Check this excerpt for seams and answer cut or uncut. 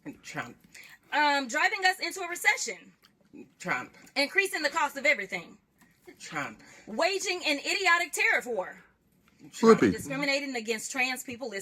cut